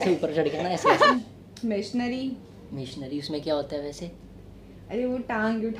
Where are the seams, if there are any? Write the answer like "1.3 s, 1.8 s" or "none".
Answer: 1.1 s